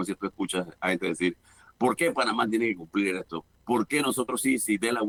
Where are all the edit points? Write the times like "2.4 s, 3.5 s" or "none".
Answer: none